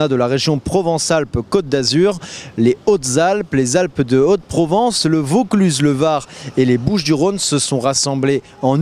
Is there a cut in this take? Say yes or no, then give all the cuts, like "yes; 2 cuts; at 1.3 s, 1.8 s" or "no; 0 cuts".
no; 0 cuts